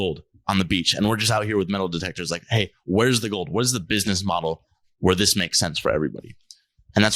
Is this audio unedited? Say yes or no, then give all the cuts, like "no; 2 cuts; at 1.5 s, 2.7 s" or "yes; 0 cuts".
yes; 0 cuts